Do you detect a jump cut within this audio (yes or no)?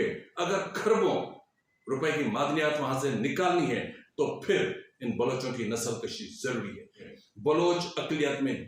yes